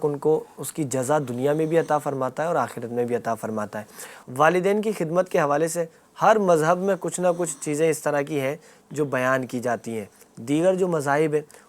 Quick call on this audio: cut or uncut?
uncut